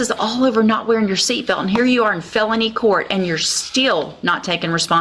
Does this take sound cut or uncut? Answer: uncut